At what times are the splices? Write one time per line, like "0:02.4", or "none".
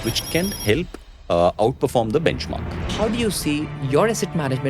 0:02.9